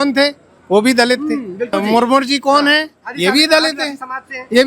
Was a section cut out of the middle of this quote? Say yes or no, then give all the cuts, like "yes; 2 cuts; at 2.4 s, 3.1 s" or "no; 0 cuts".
yes; 1 cut; at 1.7 s